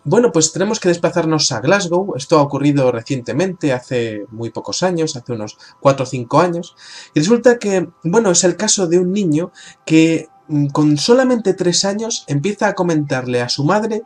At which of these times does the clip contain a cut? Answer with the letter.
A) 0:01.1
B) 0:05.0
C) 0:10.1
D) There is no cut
C